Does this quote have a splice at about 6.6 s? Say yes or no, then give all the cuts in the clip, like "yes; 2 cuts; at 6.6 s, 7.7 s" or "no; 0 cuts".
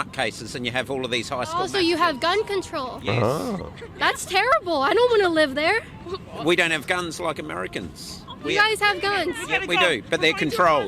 yes; 2 cuts; at 3.5 s, 6.6 s